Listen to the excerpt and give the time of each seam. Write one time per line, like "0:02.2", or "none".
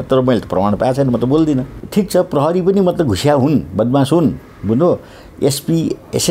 0:01.8